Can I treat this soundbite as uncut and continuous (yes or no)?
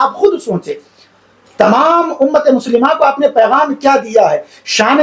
yes